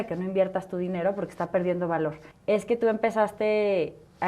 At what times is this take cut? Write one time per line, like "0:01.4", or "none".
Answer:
0:02.3